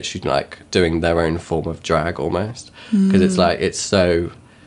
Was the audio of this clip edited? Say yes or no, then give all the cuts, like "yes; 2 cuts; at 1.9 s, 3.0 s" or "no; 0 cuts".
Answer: no; 0 cuts